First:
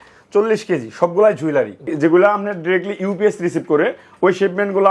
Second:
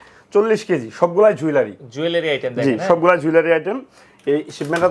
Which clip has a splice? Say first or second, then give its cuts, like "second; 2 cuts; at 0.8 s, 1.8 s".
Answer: first; 1 cut; at 1.9 s